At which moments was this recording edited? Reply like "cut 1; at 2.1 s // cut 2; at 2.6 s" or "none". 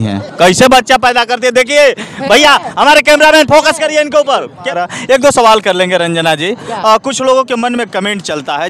cut 1; at 4.7 s